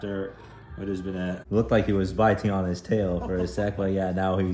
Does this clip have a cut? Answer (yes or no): yes